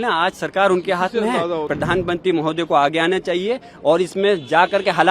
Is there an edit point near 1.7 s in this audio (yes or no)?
yes